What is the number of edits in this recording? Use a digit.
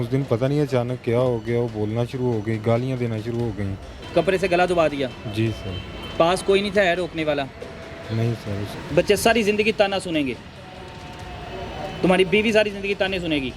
2